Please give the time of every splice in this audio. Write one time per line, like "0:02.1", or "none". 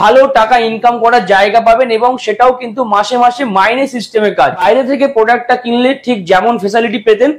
0:04.6